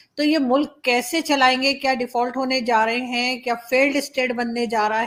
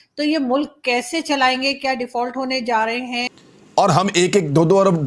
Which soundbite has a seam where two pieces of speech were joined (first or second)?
second